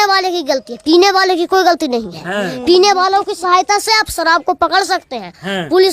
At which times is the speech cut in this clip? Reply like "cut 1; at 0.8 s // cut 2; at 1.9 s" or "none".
none